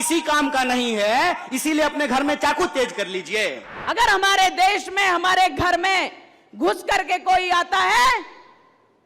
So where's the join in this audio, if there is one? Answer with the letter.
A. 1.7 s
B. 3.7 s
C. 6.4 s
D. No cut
B